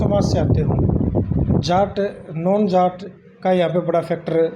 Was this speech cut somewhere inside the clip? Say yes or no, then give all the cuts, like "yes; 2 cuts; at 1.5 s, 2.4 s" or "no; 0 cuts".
no; 0 cuts